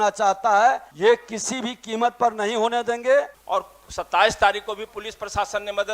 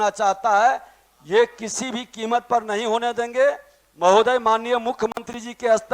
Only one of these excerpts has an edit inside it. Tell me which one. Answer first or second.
first